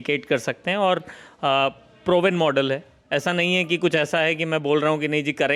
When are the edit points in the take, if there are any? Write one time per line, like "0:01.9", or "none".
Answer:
none